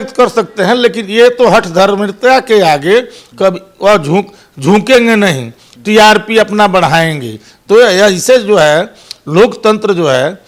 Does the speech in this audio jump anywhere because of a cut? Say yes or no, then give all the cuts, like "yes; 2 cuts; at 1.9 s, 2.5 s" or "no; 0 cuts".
no; 0 cuts